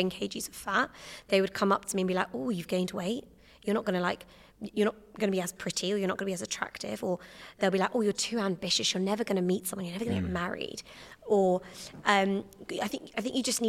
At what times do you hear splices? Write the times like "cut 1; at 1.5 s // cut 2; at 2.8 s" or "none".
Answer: none